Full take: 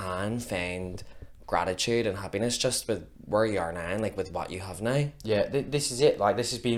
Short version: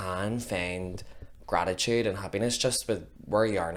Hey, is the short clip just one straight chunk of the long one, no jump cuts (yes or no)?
yes